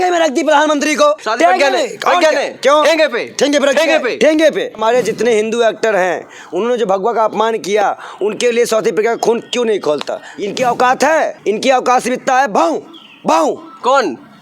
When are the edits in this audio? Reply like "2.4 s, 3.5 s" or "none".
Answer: 1.2 s, 4.8 s, 10.3 s, 11.4 s